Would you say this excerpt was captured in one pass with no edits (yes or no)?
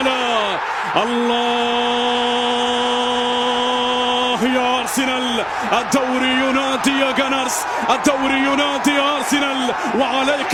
yes